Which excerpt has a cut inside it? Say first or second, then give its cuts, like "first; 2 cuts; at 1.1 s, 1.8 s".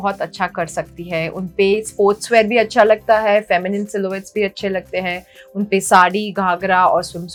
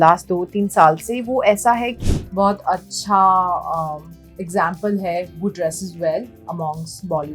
second; 1 cut; at 2.0 s